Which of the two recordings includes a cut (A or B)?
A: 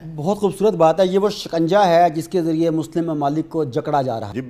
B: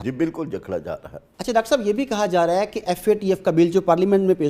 B